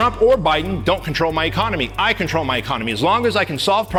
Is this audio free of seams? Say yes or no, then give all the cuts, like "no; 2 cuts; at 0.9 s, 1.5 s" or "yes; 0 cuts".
yes; 0 cuts